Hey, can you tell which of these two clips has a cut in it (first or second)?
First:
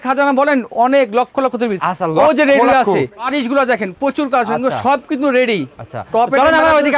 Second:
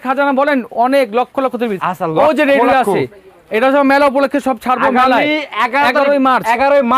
first